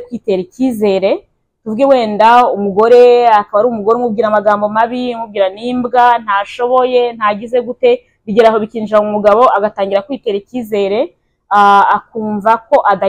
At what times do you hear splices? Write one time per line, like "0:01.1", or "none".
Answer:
none